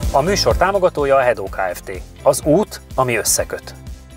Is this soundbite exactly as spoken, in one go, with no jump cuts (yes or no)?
yes